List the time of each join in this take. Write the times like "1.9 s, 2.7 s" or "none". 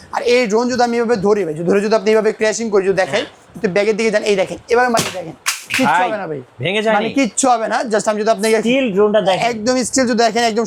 none

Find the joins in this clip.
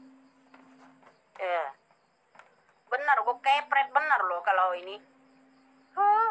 none

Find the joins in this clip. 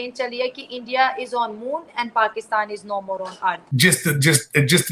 3.7 s

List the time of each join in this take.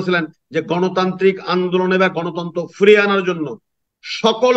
none

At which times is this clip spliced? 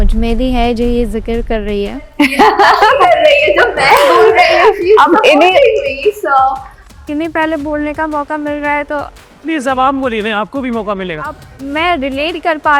none

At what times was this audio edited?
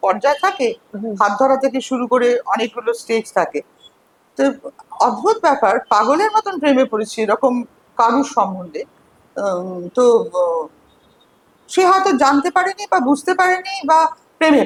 none

